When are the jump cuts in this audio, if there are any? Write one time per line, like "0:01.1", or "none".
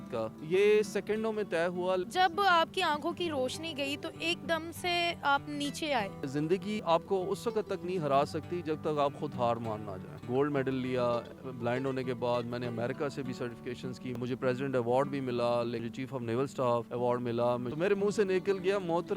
0:02.1
0:06.6
0:10.2
0:14.1
0:15.9
0:17.7